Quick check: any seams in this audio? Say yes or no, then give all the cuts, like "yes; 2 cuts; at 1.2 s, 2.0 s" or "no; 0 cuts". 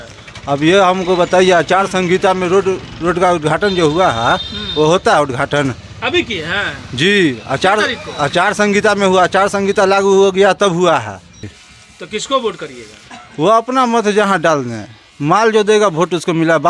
yes; 1 cut; at 11.6 s